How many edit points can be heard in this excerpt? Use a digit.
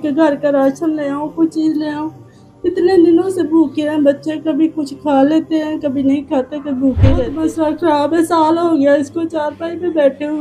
1